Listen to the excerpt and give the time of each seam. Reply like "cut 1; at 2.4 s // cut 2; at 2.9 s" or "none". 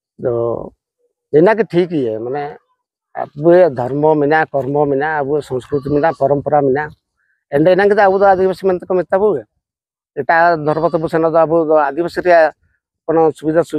none